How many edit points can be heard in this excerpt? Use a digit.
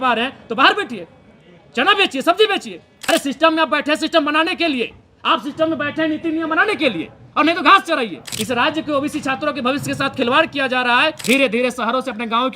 3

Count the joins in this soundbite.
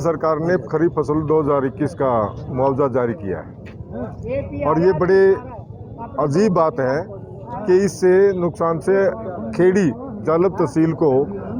0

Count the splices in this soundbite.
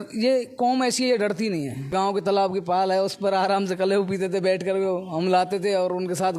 1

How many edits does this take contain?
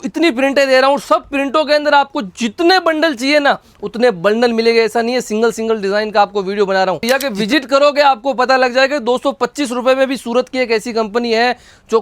1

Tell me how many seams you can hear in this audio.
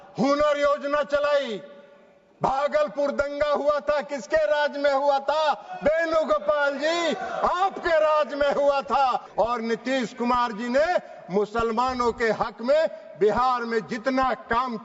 1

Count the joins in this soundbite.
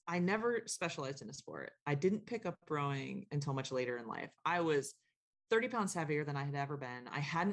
0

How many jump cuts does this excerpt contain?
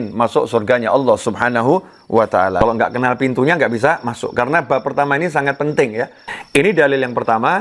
2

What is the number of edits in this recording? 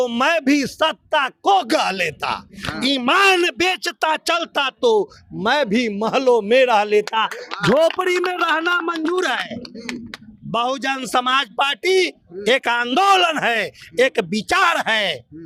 0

